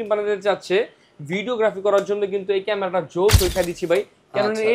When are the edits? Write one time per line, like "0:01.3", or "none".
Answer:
0:03.5